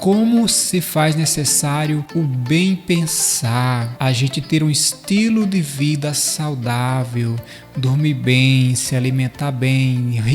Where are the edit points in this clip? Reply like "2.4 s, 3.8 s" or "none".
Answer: 2.1 s, 3.9 s